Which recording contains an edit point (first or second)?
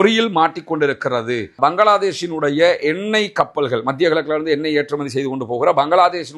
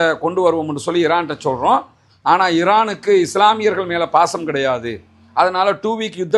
first